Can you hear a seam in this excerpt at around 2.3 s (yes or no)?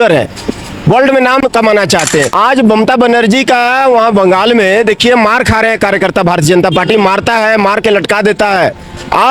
yes